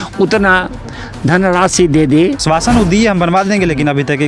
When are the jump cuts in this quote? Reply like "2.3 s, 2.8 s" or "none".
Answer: 2.4 s